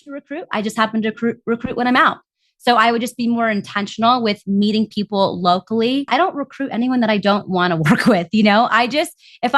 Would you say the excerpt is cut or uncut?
cut